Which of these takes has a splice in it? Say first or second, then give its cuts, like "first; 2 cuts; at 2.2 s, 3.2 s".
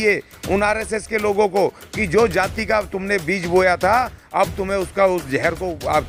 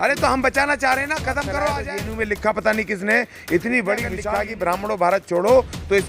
second; 2 cuts; at 1.9 s, 4.2 s